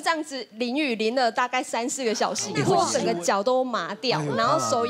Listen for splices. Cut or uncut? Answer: cut